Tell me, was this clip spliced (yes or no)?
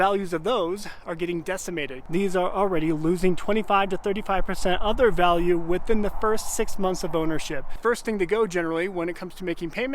yes